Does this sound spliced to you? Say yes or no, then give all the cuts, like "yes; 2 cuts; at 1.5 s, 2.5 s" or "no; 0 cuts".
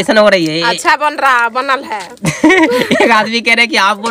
no; 0 cuts